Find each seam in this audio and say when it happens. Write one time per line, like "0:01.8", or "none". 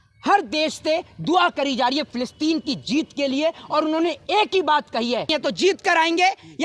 0:05.3